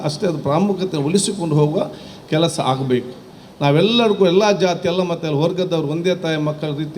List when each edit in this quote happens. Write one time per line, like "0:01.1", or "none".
0:03.2